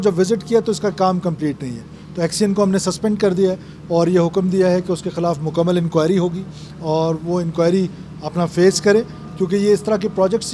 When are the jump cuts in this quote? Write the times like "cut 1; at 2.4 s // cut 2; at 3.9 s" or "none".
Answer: none